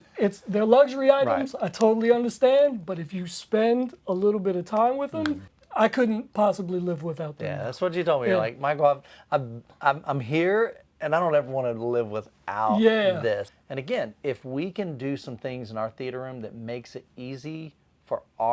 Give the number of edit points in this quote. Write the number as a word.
two